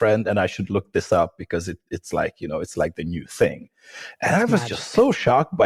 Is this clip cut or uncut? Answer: uncut